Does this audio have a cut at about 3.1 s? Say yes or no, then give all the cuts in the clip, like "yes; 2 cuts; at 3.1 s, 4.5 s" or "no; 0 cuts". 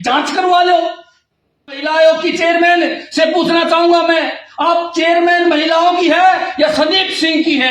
no; 1 cut; at 1.8 s